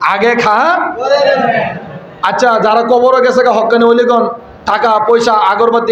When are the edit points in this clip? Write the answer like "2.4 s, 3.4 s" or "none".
none